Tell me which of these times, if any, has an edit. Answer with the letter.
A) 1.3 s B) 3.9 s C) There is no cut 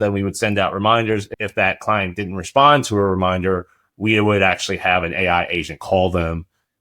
A